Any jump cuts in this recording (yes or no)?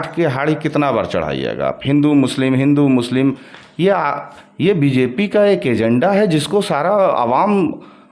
no